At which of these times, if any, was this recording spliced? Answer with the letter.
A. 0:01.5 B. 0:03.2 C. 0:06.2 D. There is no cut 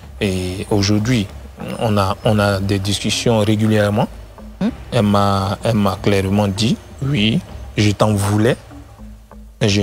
D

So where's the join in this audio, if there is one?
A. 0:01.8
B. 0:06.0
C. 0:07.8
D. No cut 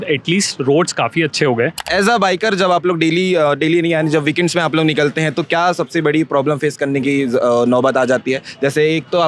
A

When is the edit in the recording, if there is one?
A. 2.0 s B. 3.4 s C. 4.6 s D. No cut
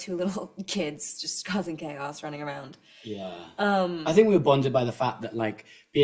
D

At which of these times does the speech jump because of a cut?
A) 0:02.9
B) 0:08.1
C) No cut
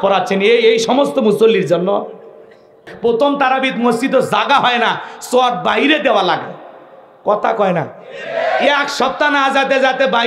A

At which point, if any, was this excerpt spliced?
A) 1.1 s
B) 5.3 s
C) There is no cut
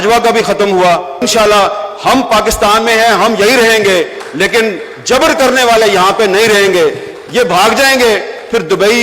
A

